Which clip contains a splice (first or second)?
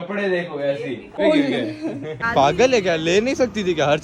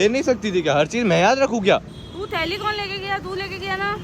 first